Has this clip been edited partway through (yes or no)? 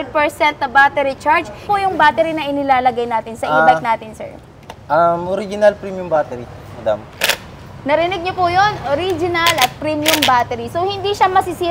yes